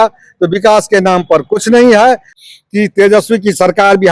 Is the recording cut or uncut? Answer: cut